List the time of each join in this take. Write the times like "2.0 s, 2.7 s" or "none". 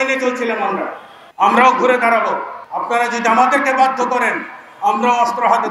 1.2 s